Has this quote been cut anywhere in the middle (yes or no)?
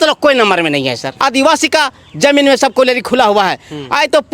yes